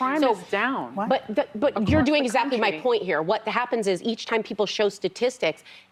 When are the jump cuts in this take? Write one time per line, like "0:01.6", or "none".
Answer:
none